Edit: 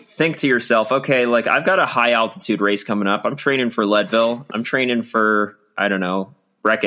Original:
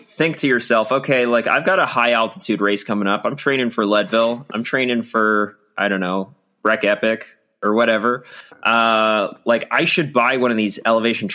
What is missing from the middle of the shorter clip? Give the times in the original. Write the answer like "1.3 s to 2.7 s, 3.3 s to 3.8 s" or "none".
none